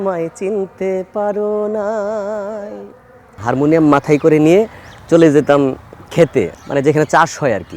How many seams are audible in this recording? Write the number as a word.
two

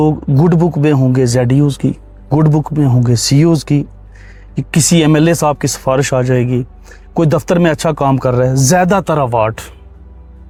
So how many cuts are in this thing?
zero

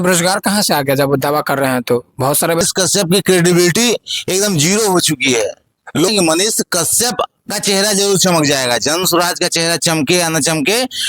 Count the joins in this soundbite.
two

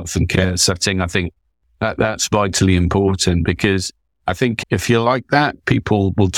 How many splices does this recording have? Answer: zero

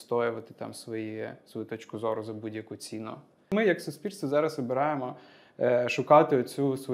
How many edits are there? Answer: one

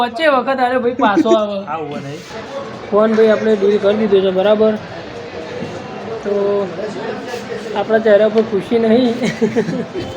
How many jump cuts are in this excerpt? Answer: one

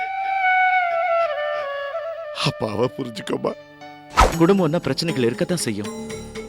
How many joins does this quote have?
one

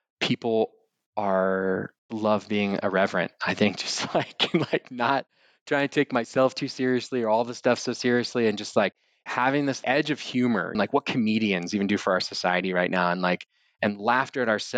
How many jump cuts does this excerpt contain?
one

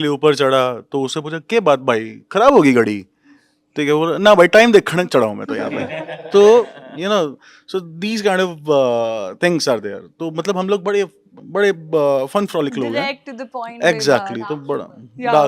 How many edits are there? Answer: zero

